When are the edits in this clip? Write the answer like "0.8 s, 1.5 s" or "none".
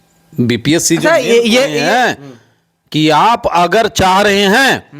1.8 s